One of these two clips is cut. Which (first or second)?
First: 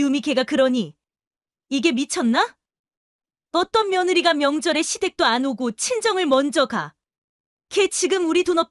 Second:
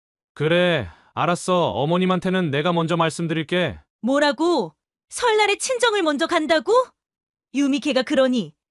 second